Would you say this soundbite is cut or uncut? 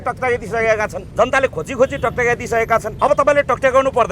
cut